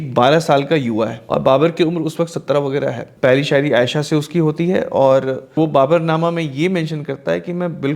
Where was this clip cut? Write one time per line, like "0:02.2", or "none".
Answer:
0:01.2
0:03.1
0:05.6